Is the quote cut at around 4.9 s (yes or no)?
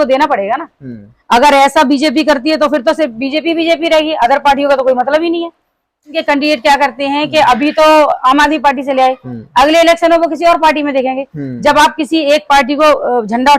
no